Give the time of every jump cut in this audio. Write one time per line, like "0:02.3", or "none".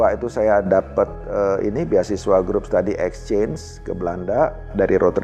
none